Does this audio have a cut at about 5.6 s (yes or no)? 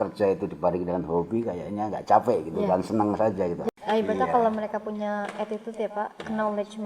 no